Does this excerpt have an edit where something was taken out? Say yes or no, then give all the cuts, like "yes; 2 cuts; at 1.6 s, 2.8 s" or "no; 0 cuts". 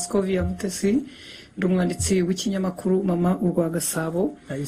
no; 0 cuts